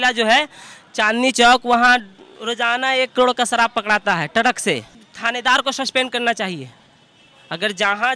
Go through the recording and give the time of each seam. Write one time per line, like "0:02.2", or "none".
0:04.9